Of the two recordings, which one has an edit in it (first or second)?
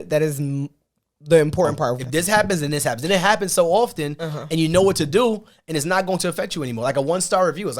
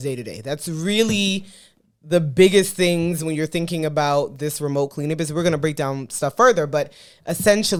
first